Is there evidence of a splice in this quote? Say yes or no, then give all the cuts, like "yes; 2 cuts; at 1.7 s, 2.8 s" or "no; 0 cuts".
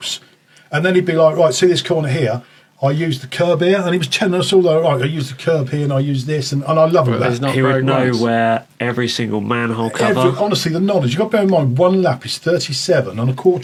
no; 0 cuts